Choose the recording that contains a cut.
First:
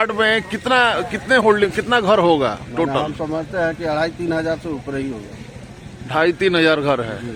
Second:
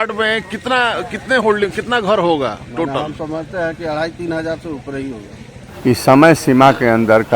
second; 1 cut; at 5.6 s

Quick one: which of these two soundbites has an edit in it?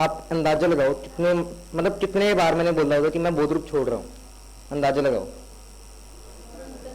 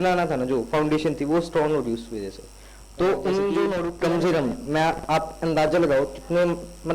second; 1 cut; at 3.9 s

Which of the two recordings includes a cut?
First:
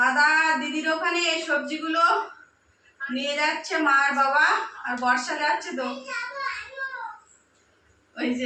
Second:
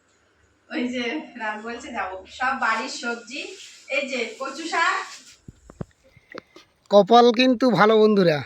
second; 1 cut; at 5.6 s

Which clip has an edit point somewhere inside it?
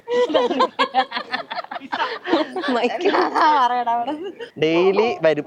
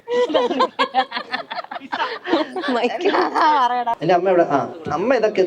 second; 1 cut; at 3.9 s

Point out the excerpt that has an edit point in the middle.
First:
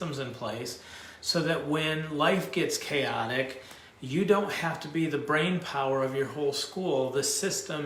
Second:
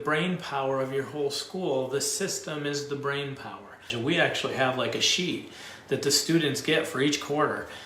second; 1 cut; at 3.9 s

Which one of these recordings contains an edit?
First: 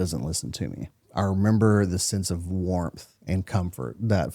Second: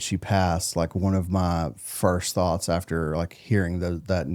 first; 1 cut; at 1.0 s

